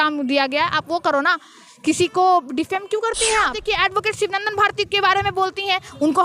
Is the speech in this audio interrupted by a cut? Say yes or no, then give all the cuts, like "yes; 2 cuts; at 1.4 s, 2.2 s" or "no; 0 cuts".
yes; 1 cut; at 3.6 s